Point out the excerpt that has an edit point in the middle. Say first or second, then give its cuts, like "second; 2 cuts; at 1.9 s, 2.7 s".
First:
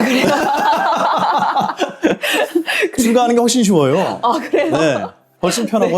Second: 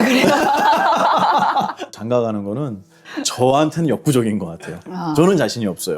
second; 1 cut; at 1.9 s